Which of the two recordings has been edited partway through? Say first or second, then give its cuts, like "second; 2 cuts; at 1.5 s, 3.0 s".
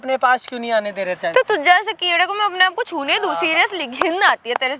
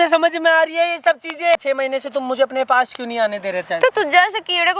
second; 1 cut; at 1.5 s